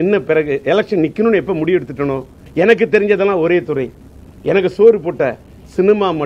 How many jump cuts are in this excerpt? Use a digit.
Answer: 1